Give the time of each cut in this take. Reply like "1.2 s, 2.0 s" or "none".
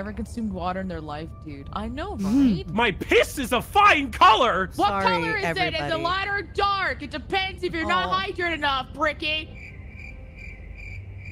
4.7 s